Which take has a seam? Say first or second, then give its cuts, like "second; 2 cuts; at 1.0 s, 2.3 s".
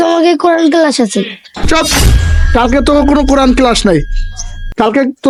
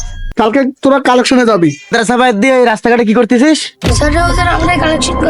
second; 1 cut; at 1.9 s